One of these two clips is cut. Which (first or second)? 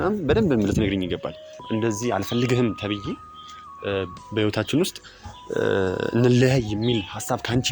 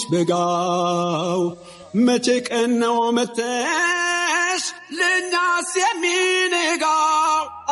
first